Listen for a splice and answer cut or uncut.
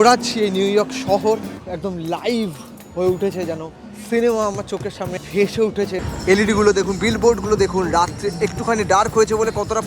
cut